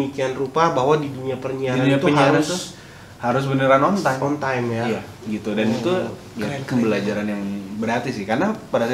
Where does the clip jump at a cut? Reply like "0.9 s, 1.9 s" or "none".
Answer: none